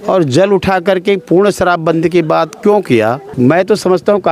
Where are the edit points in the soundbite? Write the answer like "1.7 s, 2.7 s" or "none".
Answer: 3.3 s